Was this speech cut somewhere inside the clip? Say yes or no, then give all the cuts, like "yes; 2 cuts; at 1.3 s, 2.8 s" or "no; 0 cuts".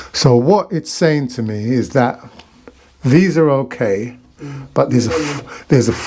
no; 0 cuts